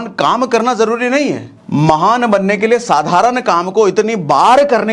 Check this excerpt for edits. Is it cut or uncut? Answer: cut